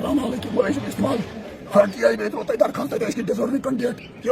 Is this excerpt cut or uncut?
cut